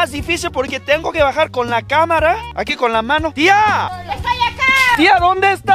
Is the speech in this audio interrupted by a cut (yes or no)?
no